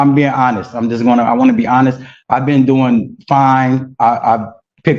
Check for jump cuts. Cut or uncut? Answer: uncut